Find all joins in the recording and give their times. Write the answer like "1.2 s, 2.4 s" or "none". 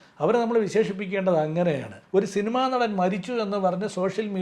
1.9 s